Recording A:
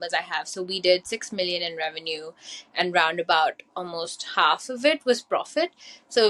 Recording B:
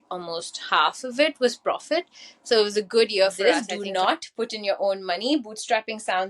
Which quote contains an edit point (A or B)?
B